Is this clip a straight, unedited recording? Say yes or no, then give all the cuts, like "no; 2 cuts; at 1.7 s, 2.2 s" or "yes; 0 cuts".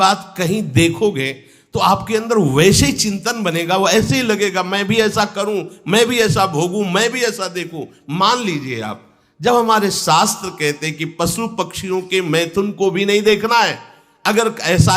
yes; 0 cuts